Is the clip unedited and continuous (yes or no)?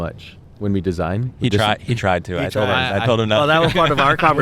yes